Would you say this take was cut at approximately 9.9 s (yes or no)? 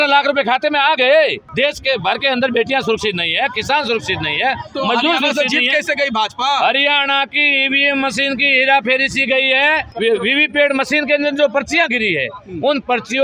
yes